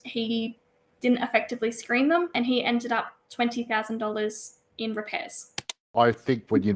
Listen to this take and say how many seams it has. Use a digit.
2